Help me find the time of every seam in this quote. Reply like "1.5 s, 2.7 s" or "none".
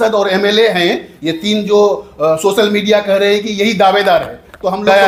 none